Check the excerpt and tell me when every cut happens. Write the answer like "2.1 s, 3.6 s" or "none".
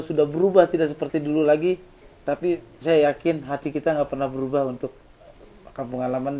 none